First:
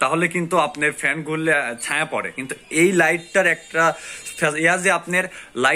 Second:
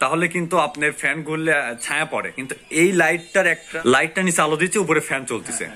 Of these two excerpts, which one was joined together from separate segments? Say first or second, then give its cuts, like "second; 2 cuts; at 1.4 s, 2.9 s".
second; 1 cut; at 3.7 s